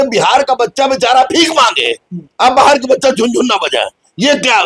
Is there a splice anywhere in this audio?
no; 0 cuts

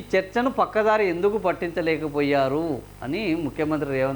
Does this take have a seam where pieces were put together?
no; 0 cuts

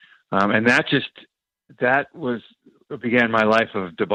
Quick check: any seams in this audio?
no; 0 cuts

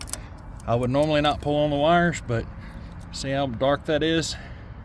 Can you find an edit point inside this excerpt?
no; 0 cuts

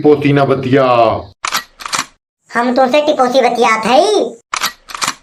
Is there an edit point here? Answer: no; 0 cuts

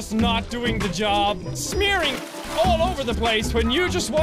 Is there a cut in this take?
no; 0 cuts

